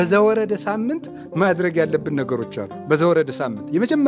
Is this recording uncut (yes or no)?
yes